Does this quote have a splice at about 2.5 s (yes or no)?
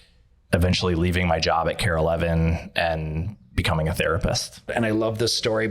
no